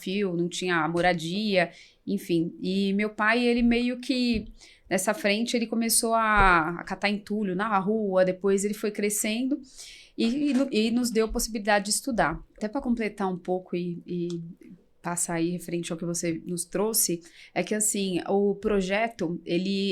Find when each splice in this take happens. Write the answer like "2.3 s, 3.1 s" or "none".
12.6 s